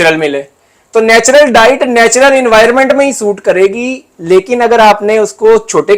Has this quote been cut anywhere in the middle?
no; 0 cuts

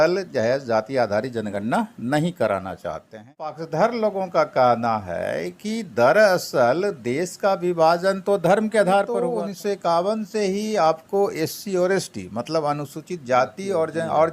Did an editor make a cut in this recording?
yes; 2 cuts; at 3.6 s, 9.2 s

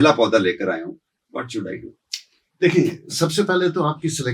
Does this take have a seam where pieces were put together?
no; 0 cuts

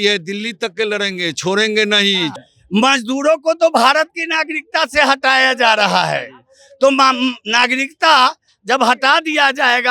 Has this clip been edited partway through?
yes; 1 cut; at 2.4 s

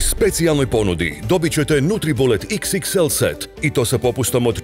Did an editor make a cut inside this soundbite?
no; 0 cuts

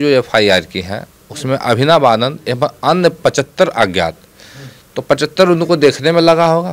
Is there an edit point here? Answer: no; 0 cuts

